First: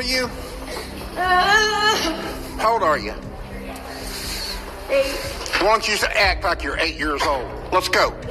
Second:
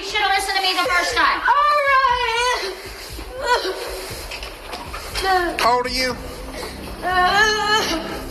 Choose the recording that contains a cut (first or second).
second